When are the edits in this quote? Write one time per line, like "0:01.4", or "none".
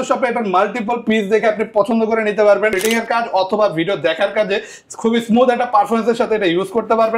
0:02.8